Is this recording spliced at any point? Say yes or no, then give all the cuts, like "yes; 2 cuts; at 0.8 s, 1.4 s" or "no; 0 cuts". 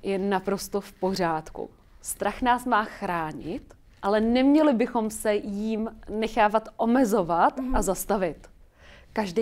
no; 0 cuts